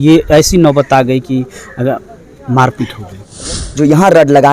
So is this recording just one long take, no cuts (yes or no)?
no